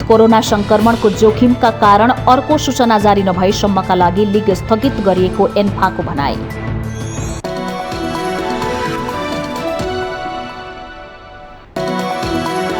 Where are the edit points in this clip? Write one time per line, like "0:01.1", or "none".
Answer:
0:11.7